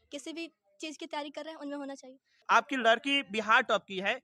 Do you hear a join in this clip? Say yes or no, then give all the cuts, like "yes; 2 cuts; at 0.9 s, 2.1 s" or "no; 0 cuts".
yes; 1 cut; at 2.3 s